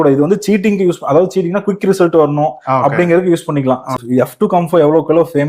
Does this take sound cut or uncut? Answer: cut